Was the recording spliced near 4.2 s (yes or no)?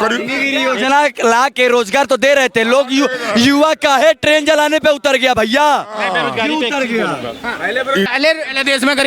no